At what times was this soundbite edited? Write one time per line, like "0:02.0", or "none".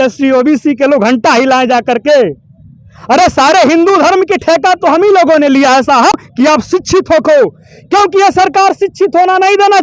0:06.3